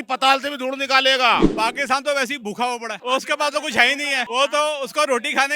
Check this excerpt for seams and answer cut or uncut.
cut